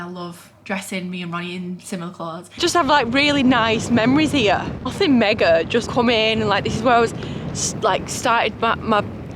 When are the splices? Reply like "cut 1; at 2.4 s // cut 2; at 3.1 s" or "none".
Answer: cut 1; at 2.6 s // cut 2; at 5.9 s